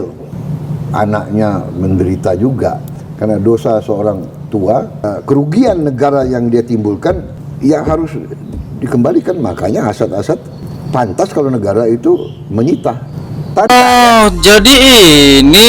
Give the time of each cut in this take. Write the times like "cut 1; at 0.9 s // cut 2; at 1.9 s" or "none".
cut 1; at 13.7 s